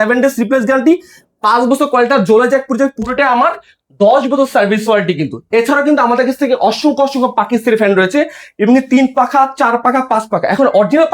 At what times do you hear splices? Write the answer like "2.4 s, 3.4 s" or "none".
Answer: none